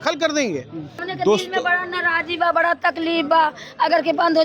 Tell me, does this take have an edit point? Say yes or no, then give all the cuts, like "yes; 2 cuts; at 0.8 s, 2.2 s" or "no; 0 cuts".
yes; 1 cut; at 1.0 s